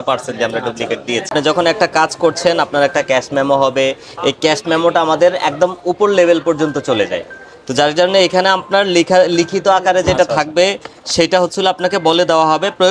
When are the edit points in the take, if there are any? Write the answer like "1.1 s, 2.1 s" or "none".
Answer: none